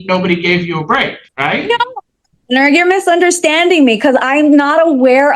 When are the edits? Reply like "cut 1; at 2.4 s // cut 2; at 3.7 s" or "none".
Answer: cut 1; at 1.2 s